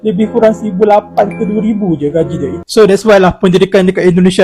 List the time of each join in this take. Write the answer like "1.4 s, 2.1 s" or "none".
2.6 s